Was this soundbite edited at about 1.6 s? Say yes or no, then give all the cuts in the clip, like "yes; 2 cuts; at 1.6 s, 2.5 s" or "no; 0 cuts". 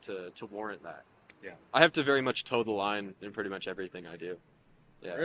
yes; 1 cut; at 1.6 s